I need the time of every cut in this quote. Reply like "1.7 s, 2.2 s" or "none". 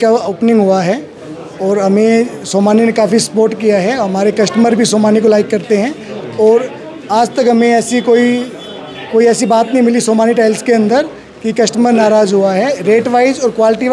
none